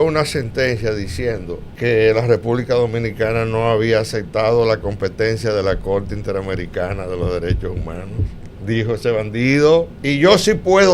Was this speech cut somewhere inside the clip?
yes; 2 cuts; at 1.7 s, 10.0 s

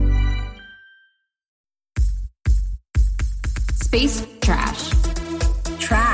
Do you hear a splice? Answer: yes; 1 cut; at 1.6 s

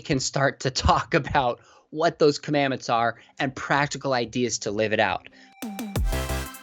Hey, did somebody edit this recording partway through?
yes; 1 cut; at 5.4 s

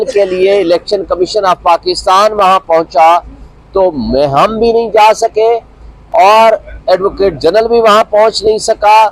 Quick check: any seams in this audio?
no; 0 cuts

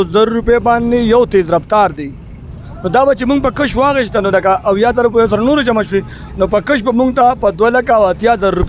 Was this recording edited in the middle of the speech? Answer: no; 0 cuts

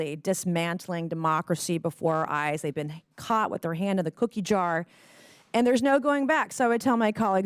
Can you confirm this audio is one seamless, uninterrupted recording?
yes; 0 cuts

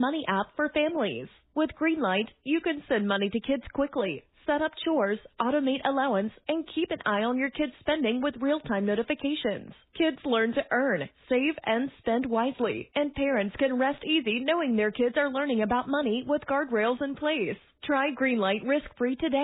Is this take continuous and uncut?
yes; 0 cuts

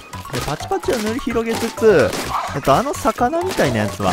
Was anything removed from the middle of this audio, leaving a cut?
no; 0 cuts

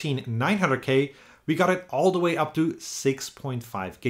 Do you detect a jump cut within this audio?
no; 0 cuts

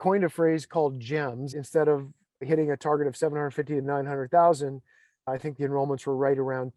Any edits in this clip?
yes; 1 cut; at 1.6 s

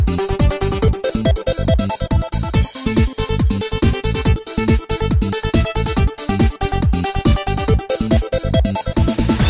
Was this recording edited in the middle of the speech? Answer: no; 0 cuts

